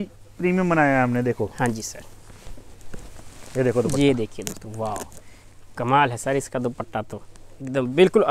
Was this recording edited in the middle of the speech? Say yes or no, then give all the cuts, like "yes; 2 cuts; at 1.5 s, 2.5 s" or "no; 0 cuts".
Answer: no; 0 cuts